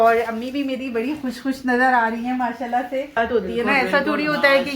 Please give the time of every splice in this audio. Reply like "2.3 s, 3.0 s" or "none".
3.1 s